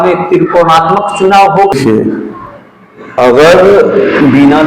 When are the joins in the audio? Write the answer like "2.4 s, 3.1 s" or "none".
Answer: 1.7 s